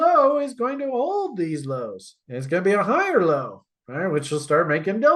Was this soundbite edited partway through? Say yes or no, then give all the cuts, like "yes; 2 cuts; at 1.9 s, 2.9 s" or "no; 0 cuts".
no; 0 cuts